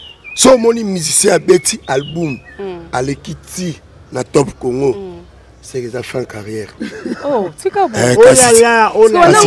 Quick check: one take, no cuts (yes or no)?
yes